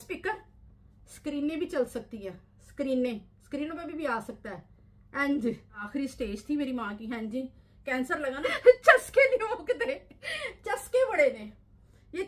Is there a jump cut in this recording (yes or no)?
yes